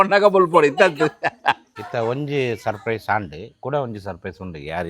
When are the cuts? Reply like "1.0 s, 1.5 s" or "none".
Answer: 1.7 s